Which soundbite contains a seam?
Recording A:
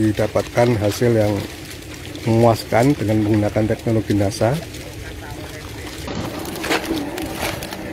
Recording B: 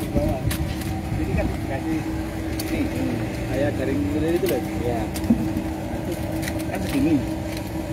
A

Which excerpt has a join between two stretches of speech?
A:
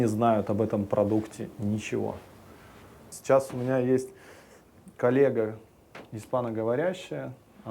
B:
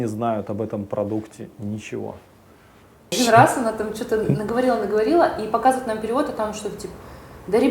B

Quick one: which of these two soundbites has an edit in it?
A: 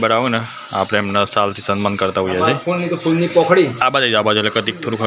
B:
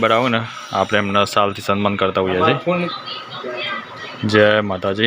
B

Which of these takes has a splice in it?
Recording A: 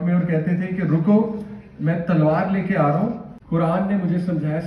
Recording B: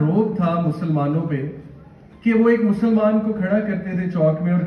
A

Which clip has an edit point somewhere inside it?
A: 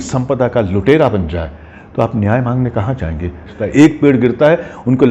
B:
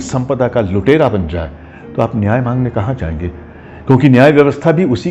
A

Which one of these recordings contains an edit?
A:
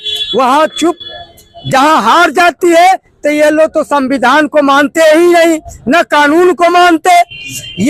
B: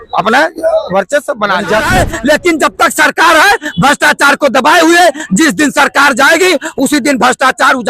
B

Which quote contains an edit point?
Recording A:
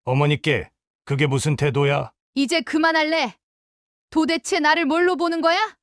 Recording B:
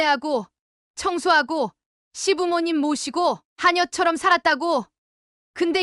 A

